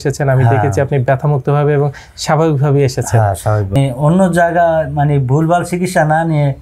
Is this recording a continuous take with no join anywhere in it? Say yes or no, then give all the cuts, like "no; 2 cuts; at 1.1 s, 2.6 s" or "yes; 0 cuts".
no; 1 cut; at 3.8 s